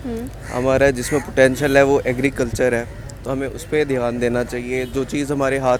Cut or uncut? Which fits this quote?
uncut